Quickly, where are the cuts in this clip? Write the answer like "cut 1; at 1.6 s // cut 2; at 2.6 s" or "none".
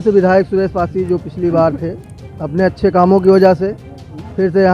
none